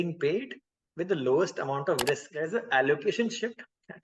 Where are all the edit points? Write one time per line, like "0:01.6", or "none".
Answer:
0:02.3